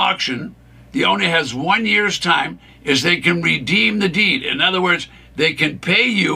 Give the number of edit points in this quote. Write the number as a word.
one